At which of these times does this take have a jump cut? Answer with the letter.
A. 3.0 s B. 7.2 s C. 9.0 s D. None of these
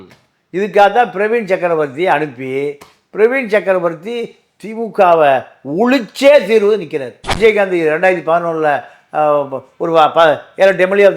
B